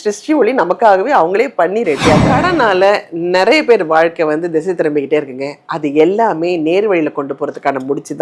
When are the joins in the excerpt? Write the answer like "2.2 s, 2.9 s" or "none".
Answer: 2.3 s